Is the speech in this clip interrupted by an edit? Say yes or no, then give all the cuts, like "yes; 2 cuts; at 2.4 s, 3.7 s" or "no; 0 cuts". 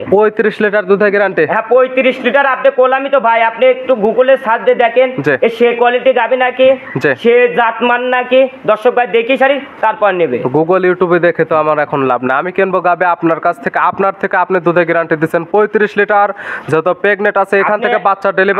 no; 0 cuts